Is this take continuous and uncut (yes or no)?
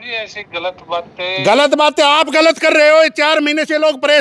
yes